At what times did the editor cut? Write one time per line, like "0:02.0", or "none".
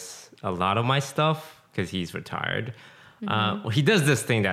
none